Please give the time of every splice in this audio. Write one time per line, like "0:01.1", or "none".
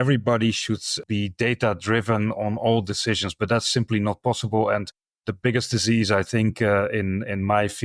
0:01.0